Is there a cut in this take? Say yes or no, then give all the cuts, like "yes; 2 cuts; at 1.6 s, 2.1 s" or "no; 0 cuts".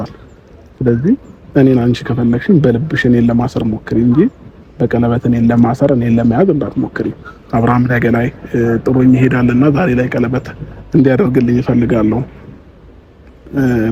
no; 0 cuts